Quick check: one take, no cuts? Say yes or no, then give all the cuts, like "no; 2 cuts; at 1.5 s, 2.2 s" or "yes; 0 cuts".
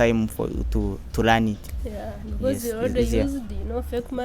yes; 0 cuts